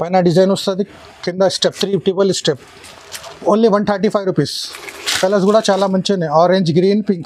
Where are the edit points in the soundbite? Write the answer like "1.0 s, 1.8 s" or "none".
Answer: none